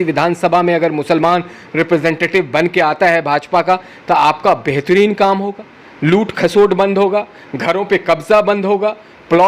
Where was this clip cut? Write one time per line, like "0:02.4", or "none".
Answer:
none